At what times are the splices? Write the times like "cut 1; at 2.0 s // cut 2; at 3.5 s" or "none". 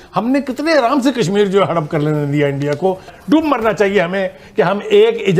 cut 1; at 3.1 s